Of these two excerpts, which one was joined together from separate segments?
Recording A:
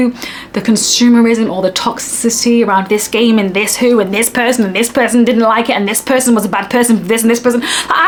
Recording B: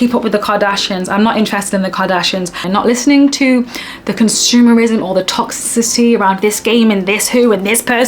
B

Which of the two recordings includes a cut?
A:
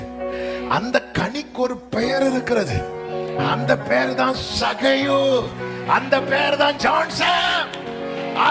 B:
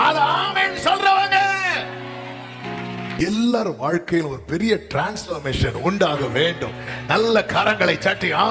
B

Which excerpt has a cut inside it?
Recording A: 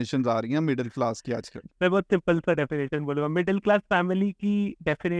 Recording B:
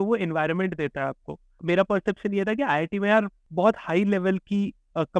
B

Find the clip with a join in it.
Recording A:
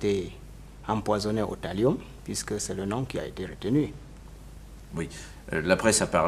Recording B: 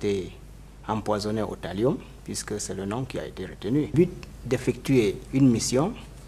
A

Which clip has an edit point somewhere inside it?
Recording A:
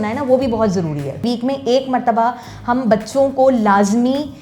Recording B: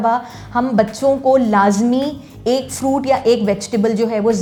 A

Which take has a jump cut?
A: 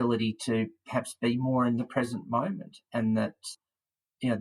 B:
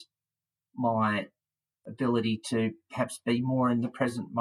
A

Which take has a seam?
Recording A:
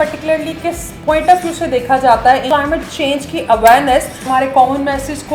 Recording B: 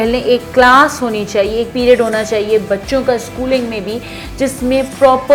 A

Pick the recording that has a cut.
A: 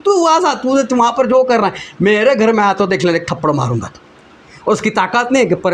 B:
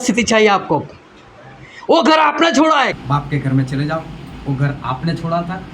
B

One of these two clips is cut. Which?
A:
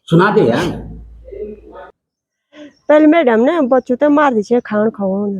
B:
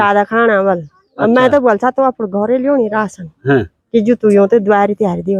A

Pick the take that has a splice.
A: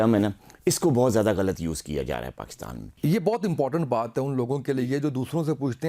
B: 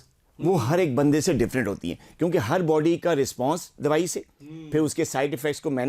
A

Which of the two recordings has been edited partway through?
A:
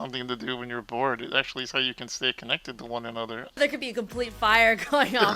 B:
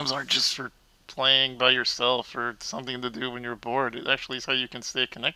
A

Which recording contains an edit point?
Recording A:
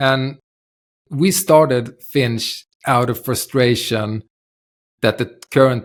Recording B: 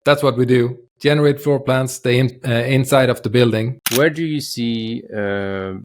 B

